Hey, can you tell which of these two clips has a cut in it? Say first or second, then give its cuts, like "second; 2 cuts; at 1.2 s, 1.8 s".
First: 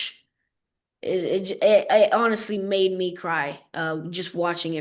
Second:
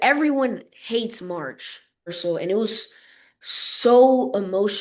second; 1 cut; at 2.2 s